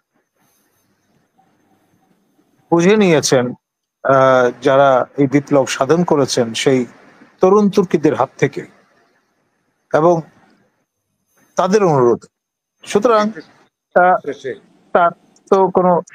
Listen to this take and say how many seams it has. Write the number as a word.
zero